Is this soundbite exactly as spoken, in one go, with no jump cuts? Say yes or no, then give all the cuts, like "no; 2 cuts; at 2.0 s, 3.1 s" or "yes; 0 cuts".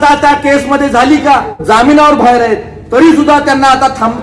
no; 1 cut; at 1.5 s